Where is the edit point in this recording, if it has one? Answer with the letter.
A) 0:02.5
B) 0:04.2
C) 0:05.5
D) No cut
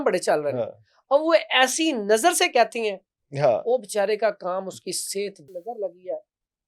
C